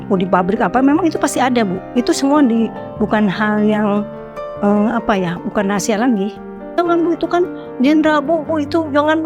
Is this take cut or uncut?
cut